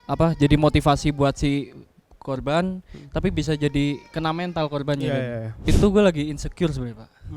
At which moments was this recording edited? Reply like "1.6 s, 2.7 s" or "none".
5.7 s